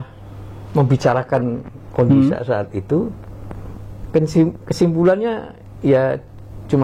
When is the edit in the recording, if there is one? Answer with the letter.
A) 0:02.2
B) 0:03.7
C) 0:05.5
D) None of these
D